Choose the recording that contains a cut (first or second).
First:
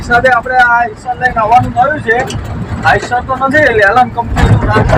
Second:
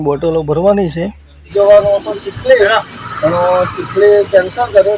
second